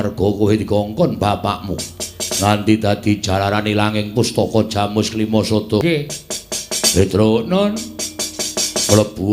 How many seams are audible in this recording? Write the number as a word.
one